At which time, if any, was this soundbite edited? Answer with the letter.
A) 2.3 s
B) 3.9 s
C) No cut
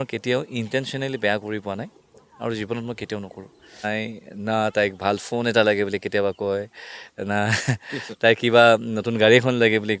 B